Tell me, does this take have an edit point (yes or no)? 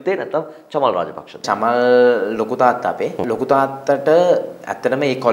yes